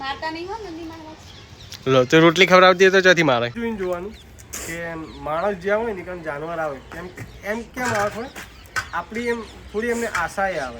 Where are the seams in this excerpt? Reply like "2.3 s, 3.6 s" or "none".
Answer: 3.6 s